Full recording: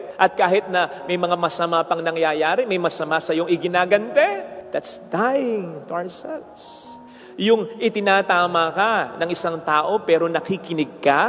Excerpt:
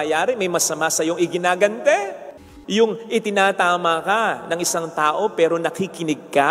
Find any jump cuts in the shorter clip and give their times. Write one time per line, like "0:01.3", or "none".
0:02.2